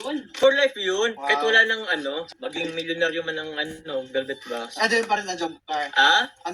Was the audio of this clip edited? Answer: yes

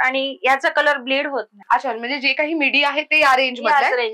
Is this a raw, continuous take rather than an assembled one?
no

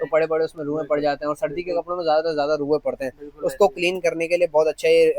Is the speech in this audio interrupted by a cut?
no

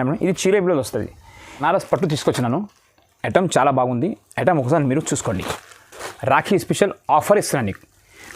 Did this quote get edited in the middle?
yes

